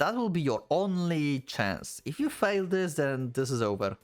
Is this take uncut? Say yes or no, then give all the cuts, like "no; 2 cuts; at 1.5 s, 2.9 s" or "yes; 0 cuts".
yes; 0 cuts